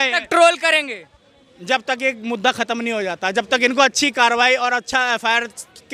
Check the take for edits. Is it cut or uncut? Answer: uncut